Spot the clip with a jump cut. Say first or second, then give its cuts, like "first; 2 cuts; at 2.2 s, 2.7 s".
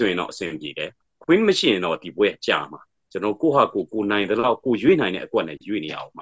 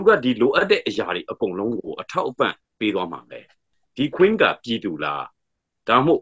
second; 1 cut; at 3.7 s